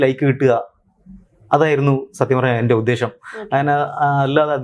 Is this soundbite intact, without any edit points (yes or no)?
yes